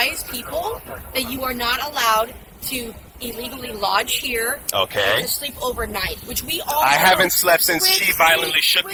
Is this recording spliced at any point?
no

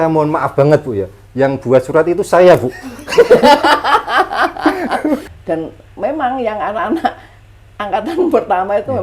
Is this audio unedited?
no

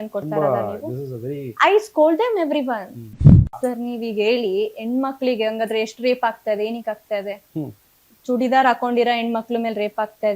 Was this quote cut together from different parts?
yes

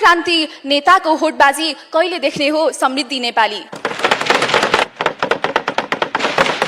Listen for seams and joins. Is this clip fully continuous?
no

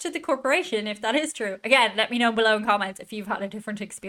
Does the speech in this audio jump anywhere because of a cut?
no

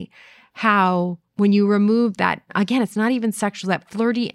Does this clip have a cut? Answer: yes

